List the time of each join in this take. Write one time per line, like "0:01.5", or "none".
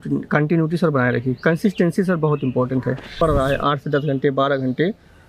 0:03.1